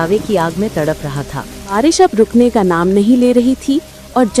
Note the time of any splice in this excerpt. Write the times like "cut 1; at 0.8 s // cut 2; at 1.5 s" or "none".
cut 1; at 1.7 s